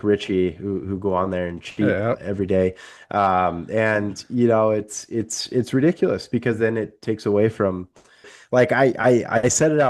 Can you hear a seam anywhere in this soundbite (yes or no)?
yes